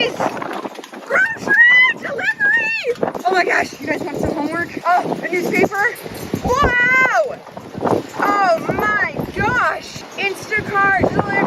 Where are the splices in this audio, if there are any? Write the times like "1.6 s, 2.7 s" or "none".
3.1 s, 10.1 s